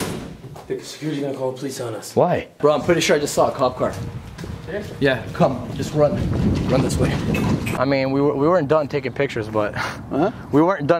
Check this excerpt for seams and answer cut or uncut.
cut